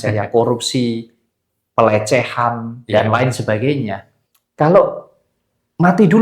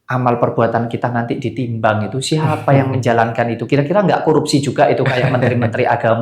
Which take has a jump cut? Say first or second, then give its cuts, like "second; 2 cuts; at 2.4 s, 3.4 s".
first; 1 cut; at 4.1 s